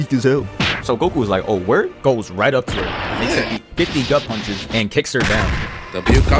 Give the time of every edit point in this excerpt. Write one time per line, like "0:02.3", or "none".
none

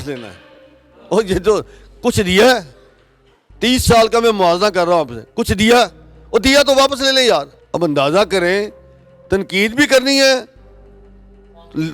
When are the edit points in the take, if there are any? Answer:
0:07.6

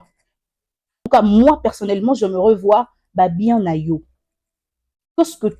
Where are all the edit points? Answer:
0:01.0

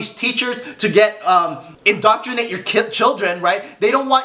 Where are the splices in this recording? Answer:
0:01.7

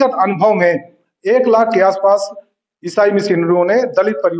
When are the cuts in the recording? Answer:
none

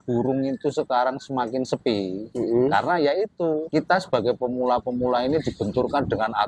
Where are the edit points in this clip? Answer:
0:02.2
0:03.6

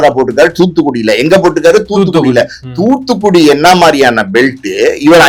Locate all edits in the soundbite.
none

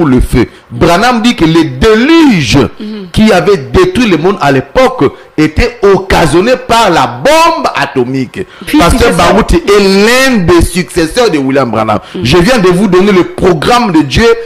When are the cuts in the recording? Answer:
0:08.7

